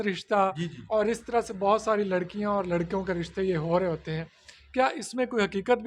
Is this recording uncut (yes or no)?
yes